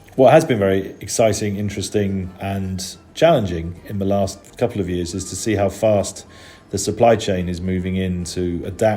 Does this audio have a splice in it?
yes; 1 cut; at 2.3 s

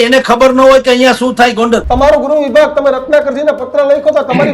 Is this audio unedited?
no; 1 cut; at 1.8 s

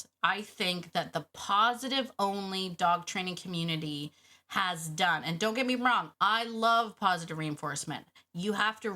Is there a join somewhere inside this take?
yes; 1 cut; at 6.1 s

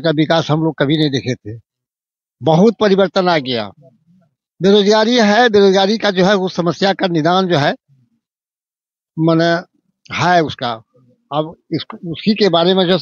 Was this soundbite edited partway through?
no; 0 cuts

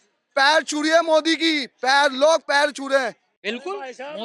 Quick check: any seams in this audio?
yes; 1 cut; at 3.2 s

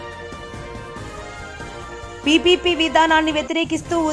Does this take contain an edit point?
no; 0 cuts

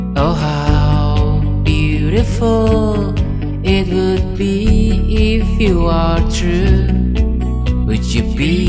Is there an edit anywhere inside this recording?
no; 0 cuts

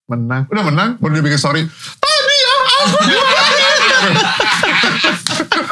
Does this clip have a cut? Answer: no; 0 cuts

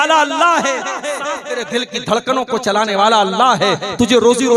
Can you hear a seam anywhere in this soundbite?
yes; 1 cut; at 1.2 s

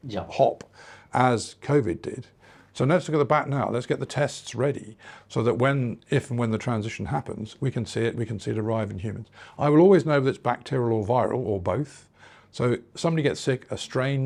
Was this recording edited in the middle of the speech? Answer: no; 0 cuts

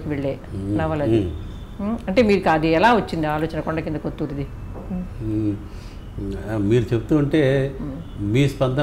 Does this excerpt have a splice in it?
no; 0 cuts

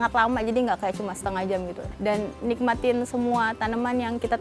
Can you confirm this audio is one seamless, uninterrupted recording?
no; 1 cut; at 1.8 s

